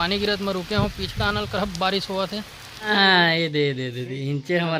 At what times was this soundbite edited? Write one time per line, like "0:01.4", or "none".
0:02.9